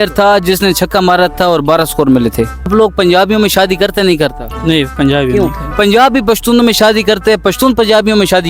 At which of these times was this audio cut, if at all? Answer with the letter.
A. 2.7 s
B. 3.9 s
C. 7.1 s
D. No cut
A